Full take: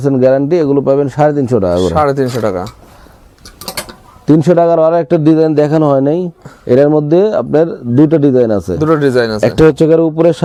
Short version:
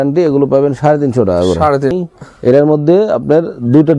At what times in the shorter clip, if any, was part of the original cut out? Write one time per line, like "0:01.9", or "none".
0:01.9